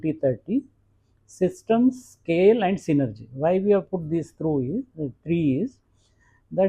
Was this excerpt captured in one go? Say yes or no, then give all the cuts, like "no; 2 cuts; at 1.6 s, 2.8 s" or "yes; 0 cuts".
yes; 0 cuts